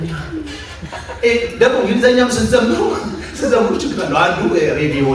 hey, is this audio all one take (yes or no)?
yes